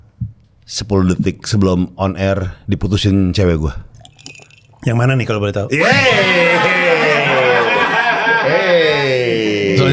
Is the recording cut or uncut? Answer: uncut